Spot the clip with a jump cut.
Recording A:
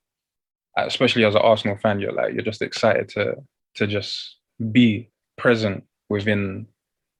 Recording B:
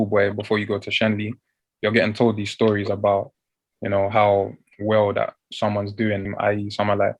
B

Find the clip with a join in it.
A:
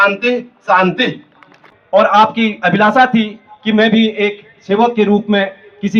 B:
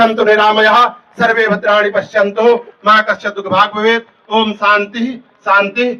A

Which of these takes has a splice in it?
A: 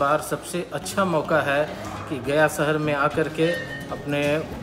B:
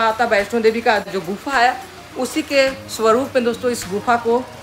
B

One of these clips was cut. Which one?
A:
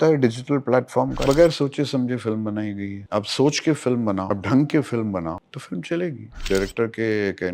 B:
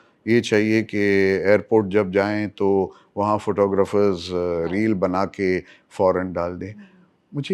A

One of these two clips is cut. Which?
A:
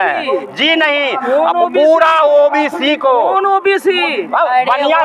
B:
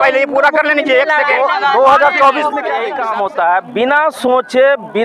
B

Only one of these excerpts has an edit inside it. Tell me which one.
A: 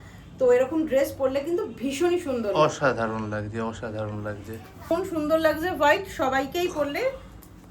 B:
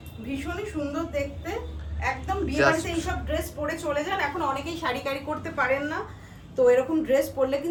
A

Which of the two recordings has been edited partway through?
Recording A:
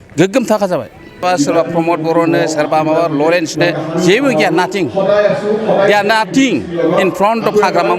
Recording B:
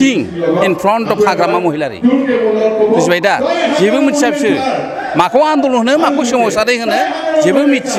A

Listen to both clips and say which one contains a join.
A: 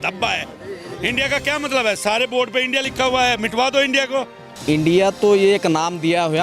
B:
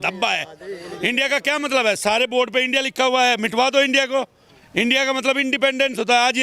A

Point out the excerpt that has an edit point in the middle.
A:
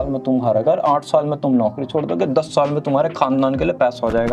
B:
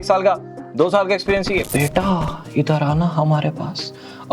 B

